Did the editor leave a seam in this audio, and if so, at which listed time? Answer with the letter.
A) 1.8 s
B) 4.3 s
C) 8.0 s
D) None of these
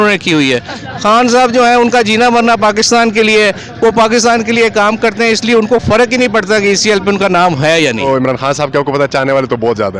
C